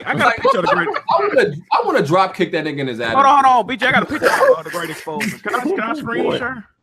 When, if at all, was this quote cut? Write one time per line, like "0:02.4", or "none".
0:02.9